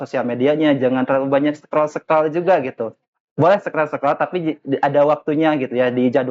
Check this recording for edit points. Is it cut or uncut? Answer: uncut